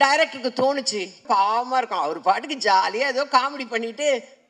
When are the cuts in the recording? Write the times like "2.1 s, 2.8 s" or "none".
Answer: 1.2 s